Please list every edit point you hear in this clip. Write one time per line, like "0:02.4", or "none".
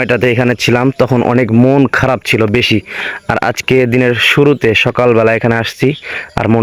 none